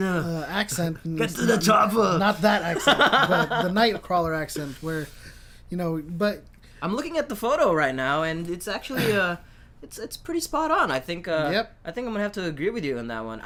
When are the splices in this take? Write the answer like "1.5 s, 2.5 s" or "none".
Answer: none